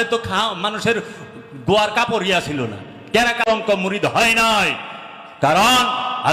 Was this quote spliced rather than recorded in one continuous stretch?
yes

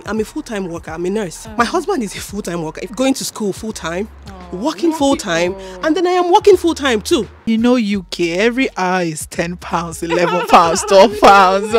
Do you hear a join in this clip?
yes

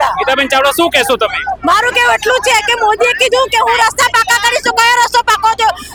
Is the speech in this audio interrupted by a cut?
no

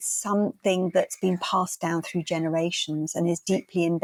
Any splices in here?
no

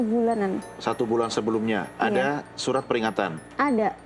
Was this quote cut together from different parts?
no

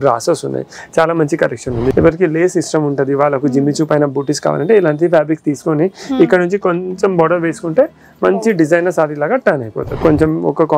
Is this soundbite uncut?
no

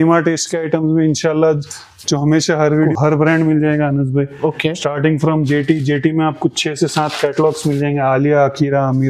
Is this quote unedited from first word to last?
no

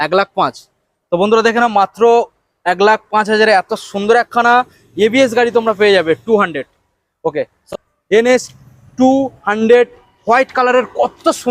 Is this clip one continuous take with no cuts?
no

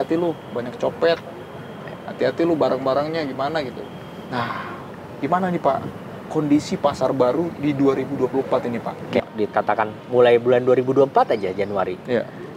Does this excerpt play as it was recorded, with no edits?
no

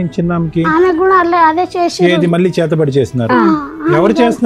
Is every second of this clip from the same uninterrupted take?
yes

